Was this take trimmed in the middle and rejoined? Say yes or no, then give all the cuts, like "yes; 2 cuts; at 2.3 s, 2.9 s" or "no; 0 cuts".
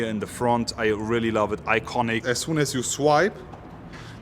yes; 1 cut; at 2.2 s